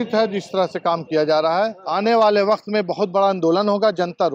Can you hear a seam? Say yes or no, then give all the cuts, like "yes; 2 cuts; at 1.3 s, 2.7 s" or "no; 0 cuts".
yes; 1 cut; at 1.8 s